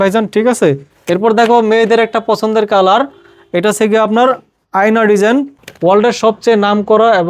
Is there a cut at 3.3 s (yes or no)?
no